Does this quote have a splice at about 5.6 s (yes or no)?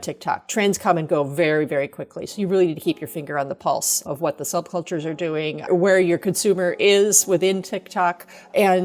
yes